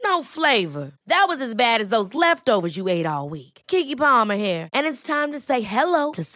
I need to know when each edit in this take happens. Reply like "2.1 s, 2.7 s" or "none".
none